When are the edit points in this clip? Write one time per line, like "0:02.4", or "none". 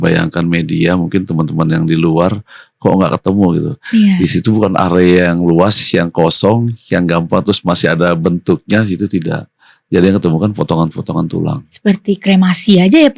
none